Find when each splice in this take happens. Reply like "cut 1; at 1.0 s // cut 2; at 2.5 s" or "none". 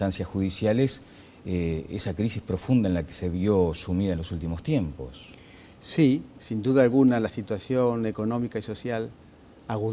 none

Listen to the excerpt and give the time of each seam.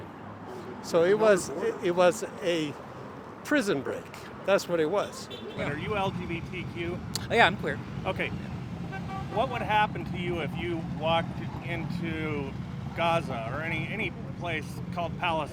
cut 1; at 5.5 s

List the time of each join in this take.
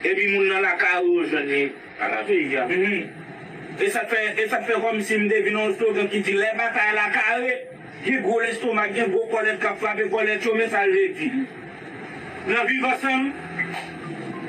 none

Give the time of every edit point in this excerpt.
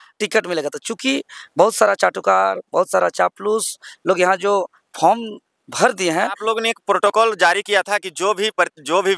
cut 1; at 6.4 s

